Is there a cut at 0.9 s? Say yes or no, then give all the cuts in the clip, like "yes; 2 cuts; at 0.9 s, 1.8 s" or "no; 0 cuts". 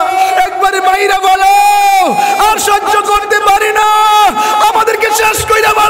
no; 0 cuts